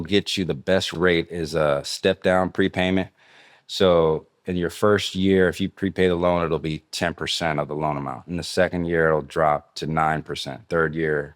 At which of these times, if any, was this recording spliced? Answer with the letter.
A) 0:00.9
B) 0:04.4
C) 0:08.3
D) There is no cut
A